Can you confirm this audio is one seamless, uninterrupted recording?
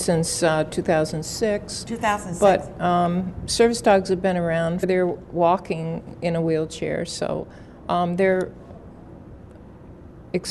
yes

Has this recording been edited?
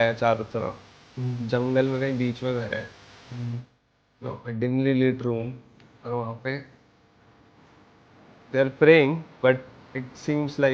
no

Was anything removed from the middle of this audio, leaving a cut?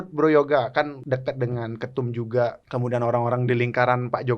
yes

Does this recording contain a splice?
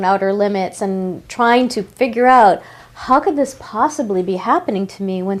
no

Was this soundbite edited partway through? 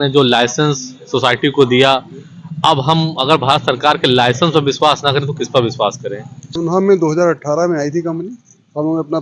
yes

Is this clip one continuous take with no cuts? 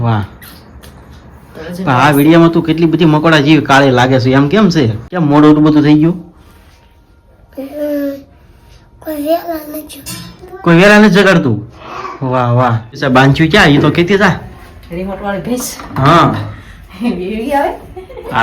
no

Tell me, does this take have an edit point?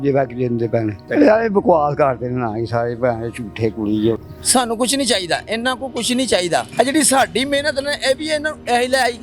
yes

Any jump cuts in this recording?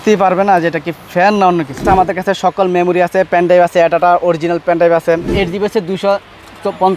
yes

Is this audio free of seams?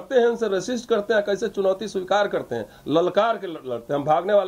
yes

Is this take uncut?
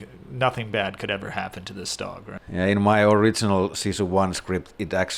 yes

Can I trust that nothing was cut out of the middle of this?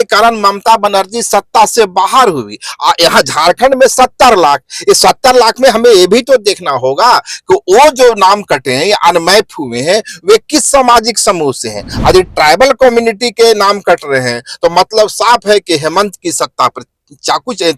yes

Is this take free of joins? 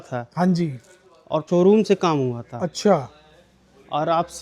no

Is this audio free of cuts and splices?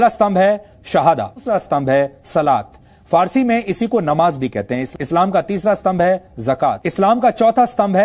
no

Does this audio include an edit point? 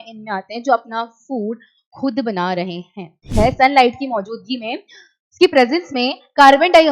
yes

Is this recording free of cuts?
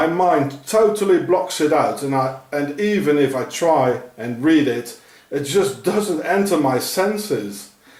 yes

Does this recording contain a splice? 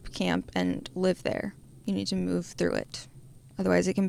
no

